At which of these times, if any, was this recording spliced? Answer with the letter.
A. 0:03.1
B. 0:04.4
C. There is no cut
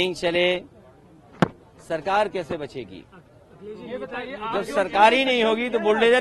C